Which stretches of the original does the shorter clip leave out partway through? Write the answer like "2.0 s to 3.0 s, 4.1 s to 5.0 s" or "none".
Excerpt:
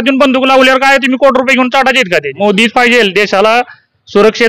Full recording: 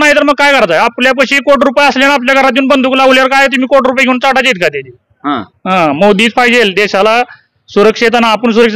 4.9 s to 6.0 s